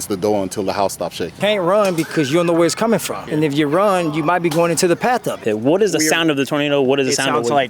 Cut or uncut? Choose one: cut